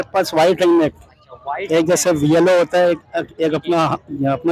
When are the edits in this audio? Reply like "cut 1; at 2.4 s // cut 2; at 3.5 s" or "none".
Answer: none